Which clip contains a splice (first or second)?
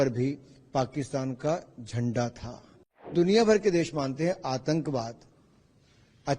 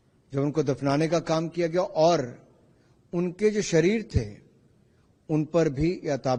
first